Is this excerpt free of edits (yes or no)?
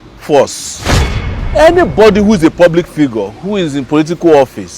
no